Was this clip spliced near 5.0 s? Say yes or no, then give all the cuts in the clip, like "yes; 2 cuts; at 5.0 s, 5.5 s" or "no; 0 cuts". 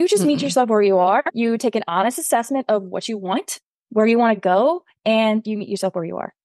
no; 0 cuts